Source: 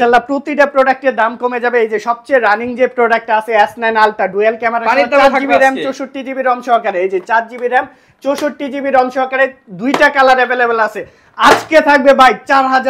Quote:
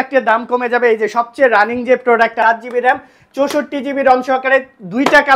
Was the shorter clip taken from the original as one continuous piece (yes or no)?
no